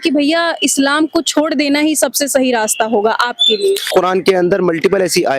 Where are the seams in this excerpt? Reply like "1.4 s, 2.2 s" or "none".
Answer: 3.9 s

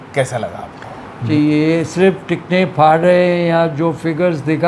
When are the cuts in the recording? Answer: 1.2 s

